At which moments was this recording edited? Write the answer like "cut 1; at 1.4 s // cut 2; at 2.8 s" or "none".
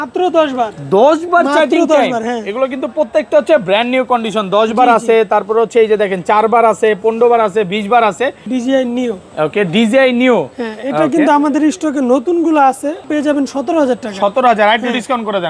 cut 1; at 8.5 s // cut 2; at 13.1 s